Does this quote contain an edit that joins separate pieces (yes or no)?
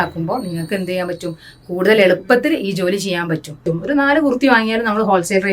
yes